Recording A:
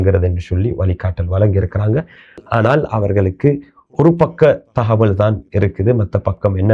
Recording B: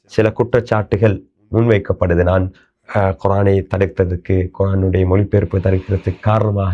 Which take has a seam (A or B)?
A